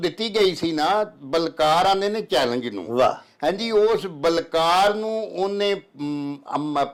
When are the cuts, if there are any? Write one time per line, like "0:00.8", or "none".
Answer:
none